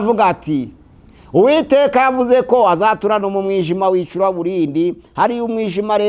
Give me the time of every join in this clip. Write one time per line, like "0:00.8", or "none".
none